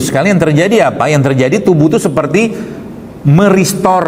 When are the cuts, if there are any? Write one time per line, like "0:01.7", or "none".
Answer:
none